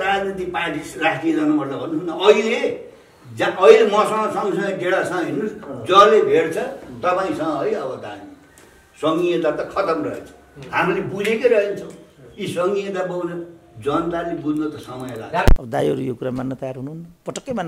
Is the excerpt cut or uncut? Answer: cut